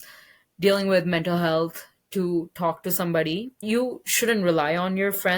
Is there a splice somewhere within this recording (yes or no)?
yes